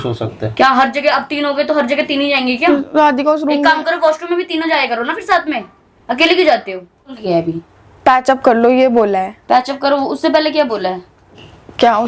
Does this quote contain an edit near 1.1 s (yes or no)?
no